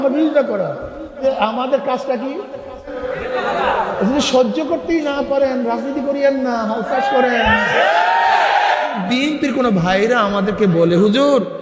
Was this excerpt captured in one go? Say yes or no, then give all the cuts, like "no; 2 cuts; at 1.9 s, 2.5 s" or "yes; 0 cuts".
no; 3 cuts; at 1.2 s, 3.0 s, 9.0 s